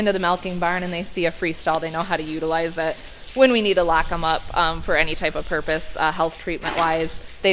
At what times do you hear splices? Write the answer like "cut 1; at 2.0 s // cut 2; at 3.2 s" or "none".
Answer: none